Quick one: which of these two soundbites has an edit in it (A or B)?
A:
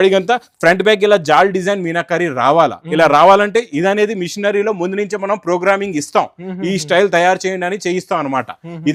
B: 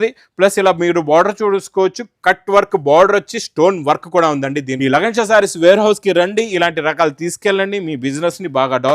B